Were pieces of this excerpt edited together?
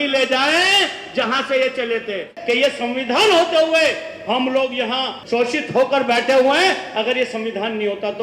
yes; 2 cuts; at 2.3 s, 5.2 s

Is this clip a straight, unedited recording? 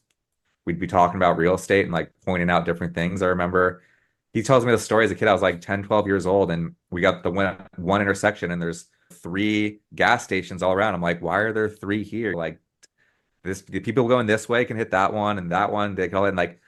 yes; 0 cuts

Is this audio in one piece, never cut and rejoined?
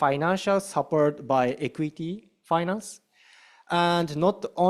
yes; 0 cuts

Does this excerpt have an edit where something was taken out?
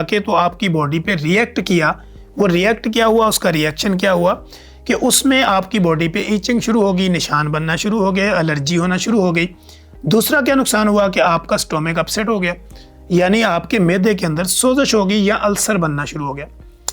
no; 0 cuts

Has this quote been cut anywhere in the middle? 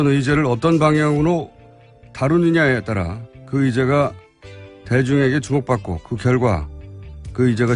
yes; 1 cut; at 2.0 s

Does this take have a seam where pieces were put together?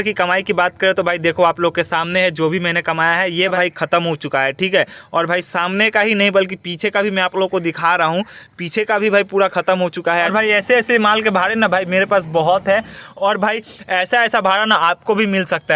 yes; 3 cuts; at 3.5 s, 10.3 s, 13.0 s

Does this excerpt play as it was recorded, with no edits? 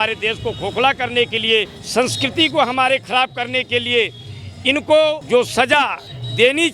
yes; 0 cuts

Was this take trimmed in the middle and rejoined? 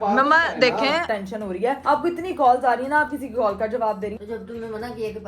yes; 2 cuts; at 1.2 s, 4.2 s

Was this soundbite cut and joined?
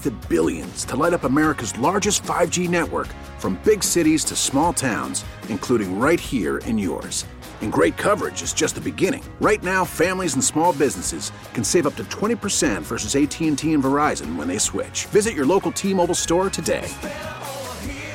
no; 0 cuts

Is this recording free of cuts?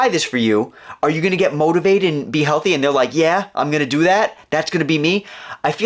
yes; 0 cuts

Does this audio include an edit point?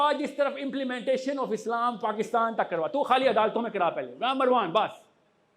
no; 0 cuts

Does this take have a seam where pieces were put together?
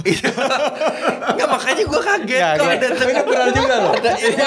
no; 0 cuts

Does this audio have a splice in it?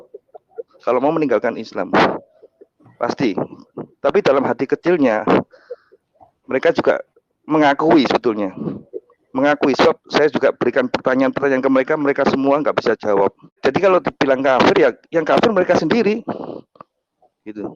yes; 1 cut; at 13.6 s

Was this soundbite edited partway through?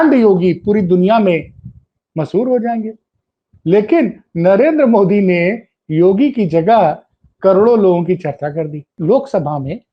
yes; 1 cut; at 8.9 s

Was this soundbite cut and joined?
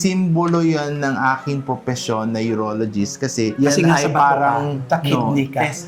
no; 0 cuts

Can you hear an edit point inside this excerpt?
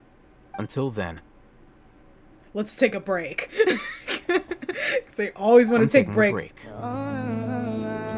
no; 0 cuts

